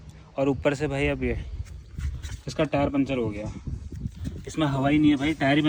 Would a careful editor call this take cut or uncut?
uncut